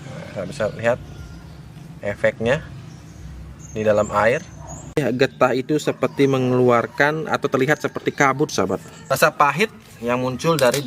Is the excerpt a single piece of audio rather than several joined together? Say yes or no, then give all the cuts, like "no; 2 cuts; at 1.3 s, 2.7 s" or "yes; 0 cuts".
no; 2 cuts; at 5.0 s, 8.9 s